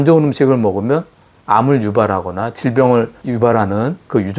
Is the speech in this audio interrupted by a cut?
yes; 1 cut; at 3.2 s

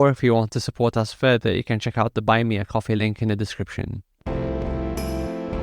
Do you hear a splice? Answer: yes; 1 cut; at 4.2 s

